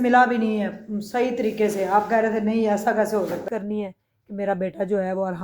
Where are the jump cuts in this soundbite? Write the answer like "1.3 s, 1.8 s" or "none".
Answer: 3.4 s